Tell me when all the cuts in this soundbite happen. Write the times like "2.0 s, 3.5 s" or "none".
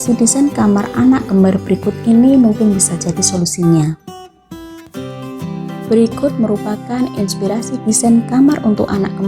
4.0 s, 5.9 s

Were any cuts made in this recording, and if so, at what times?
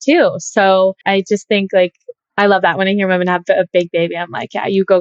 none

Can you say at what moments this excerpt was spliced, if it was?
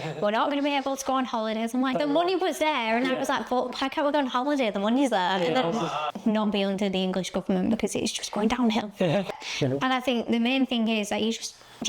1.9 s, 6.0 s, 9.3 s

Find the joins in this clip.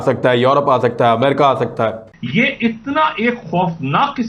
2.1 s

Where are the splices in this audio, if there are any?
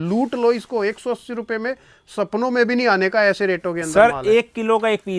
none

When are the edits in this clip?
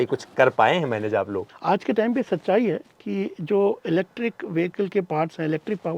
1.4 s

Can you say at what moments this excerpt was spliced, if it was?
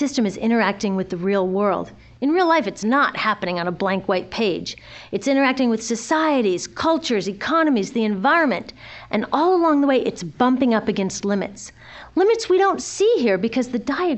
4.3 s

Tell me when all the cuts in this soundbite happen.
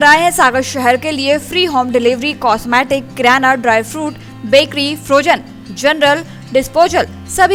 none

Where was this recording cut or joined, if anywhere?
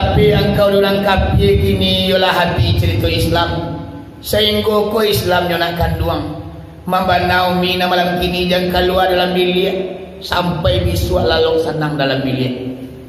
none

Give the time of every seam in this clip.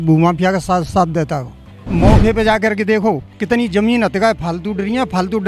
1.7 s

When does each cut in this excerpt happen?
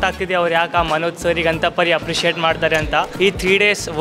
3.1 s

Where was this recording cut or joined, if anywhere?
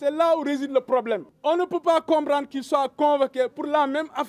1.3 s

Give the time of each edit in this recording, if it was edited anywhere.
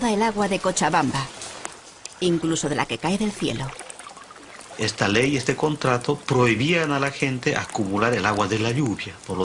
3.7 s

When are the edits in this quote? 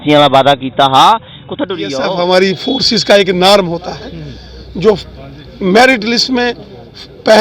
2.0 s

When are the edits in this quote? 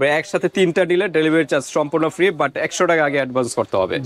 none

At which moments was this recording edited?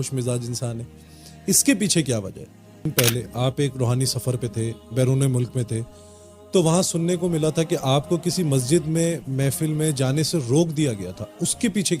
2.9 s

